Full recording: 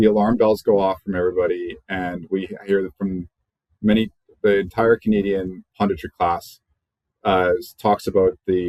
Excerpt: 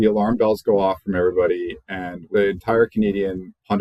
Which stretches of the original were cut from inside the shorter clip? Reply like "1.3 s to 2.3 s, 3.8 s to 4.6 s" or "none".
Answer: 2.1 s to 4.2 s